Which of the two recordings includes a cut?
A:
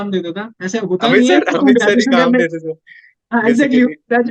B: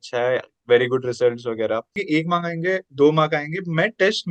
B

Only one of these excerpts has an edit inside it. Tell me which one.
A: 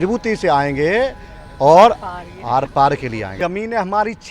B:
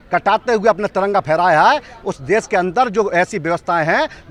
A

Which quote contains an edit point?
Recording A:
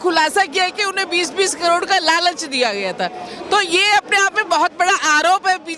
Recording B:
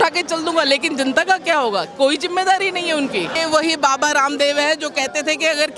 B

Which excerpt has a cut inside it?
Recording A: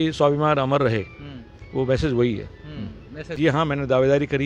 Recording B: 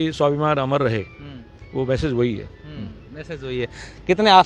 A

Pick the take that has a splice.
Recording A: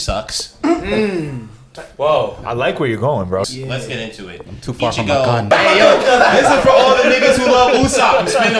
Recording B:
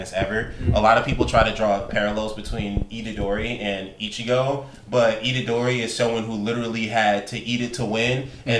A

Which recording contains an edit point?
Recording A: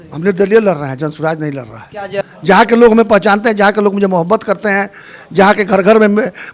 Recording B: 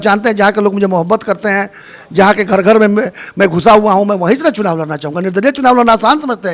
A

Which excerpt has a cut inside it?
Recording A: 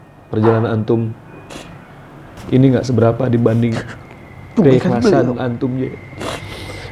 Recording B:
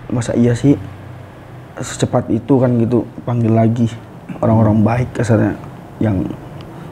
A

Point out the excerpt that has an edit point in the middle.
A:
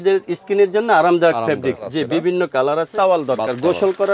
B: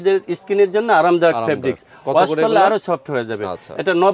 A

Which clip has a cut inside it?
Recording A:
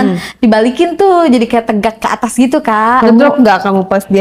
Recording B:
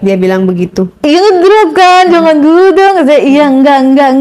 A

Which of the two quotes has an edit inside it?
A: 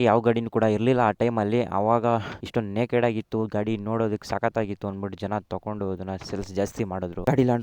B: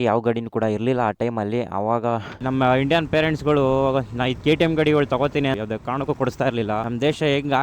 B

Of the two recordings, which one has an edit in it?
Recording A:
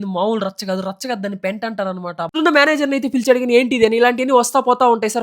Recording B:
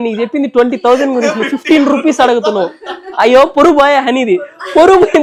A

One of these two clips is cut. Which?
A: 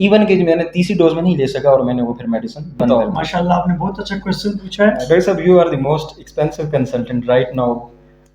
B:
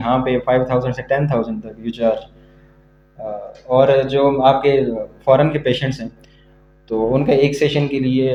A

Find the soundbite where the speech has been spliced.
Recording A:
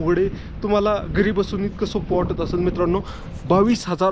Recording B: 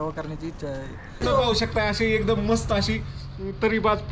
B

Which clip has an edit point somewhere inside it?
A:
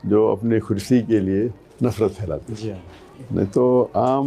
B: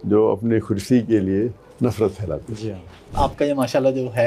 B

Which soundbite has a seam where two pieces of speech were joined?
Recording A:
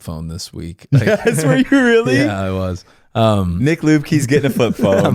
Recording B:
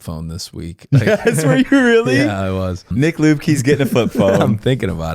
B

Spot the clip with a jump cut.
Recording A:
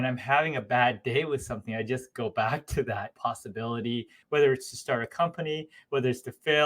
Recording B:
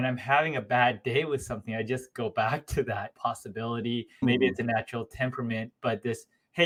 A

